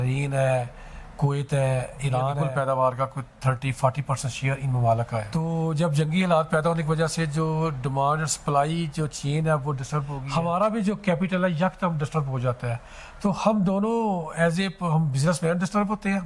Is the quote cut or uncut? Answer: cut